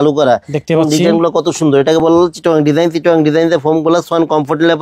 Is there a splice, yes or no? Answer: no